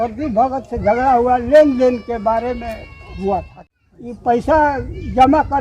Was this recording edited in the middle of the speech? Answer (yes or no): yes